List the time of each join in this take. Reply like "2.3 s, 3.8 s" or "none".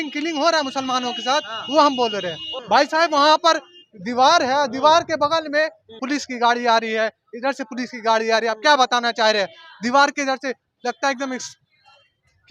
2.4 s, 6.0 s